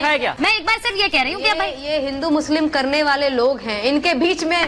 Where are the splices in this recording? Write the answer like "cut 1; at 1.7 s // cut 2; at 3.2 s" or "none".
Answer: none